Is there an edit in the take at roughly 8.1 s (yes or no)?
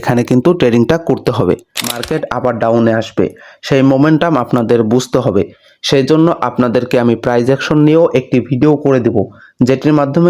no